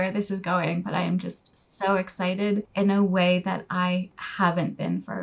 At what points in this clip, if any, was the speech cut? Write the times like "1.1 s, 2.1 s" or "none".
none